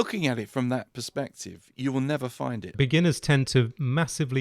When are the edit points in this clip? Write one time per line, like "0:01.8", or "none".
0:02.7